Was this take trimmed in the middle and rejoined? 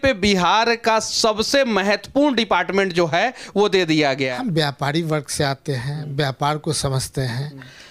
yes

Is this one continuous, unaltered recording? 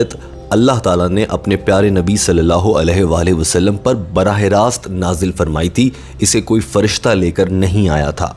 yes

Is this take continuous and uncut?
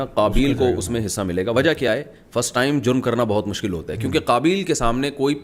yes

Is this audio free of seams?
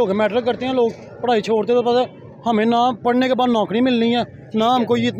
yes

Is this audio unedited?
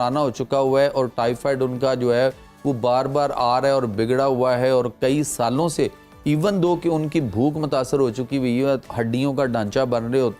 yes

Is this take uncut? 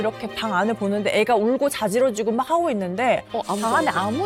yes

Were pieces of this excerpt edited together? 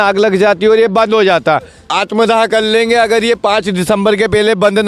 yes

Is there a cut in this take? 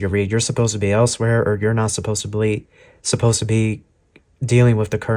no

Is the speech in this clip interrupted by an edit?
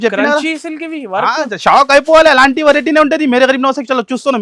no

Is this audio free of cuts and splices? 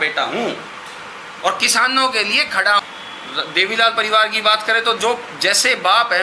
no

